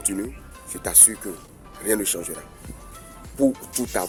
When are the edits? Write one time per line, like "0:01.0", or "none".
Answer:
none